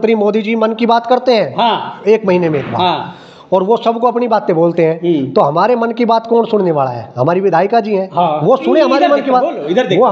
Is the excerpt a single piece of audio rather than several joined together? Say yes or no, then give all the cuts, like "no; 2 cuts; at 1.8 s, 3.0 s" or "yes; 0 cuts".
yes; 0 cuts